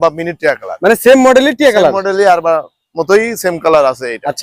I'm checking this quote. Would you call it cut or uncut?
uncut